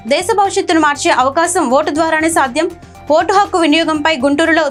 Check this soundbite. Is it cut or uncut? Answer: uncut